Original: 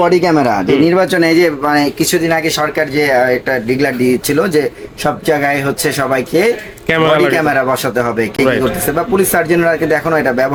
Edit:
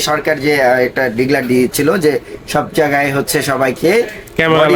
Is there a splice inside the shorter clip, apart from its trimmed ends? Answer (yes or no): no